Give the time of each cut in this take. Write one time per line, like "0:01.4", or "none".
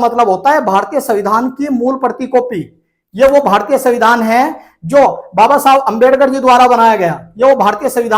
none